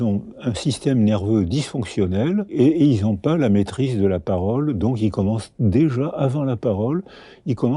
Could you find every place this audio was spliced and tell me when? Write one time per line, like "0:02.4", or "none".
0:02.5